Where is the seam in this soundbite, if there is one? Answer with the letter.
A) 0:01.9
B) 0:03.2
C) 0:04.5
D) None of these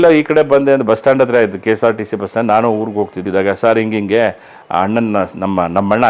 B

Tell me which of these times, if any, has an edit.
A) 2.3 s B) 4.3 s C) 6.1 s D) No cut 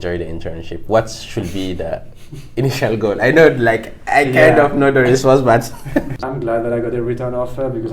C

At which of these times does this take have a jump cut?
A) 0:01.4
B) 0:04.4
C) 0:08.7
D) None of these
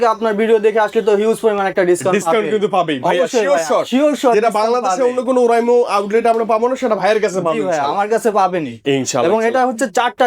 D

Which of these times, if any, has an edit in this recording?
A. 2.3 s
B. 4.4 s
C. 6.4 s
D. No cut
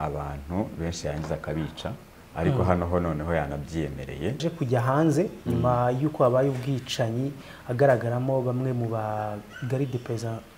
B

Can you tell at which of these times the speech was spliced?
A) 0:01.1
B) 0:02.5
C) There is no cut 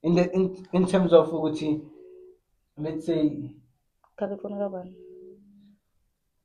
C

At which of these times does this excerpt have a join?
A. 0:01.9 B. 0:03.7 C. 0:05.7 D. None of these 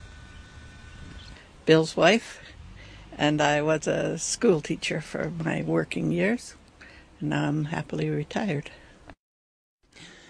B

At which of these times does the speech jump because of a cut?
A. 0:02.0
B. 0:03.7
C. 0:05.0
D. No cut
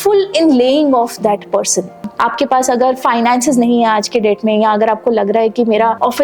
A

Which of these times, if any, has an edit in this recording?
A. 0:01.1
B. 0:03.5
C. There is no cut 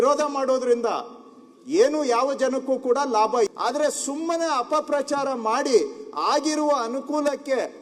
B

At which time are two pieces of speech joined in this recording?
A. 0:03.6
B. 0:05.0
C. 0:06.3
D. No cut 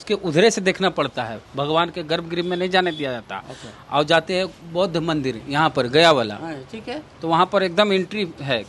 D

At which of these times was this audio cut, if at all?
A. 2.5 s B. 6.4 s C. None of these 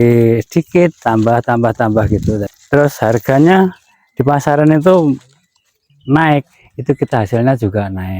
A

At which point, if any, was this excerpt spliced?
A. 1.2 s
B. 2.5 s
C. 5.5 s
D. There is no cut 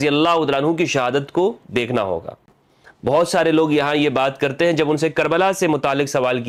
D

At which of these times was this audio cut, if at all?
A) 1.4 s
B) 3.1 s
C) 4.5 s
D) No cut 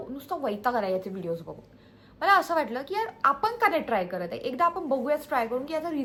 D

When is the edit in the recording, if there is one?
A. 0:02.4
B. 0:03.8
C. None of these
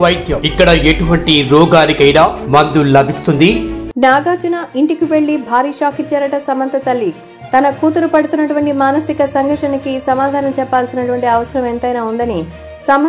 B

